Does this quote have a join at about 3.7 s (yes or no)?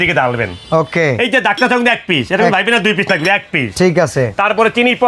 no